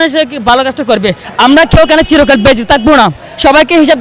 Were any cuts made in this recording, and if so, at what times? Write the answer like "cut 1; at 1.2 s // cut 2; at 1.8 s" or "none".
cut 1; at 1.2 s